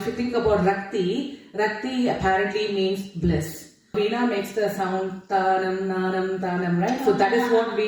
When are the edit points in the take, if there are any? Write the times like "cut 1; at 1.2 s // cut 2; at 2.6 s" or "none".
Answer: cut 1; at 3.9 s